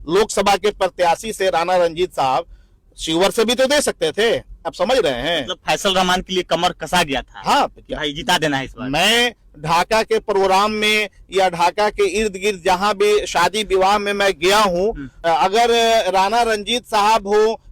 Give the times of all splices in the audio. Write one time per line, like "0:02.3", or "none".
0:04.7
0:15.2